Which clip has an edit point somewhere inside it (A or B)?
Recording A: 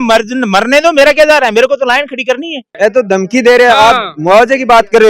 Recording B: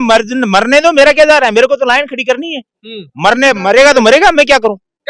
A